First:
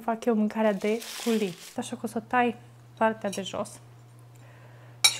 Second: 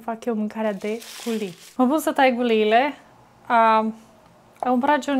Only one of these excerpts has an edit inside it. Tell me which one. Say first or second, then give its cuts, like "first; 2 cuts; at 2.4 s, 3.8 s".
first; 1 cut; at 1.7 s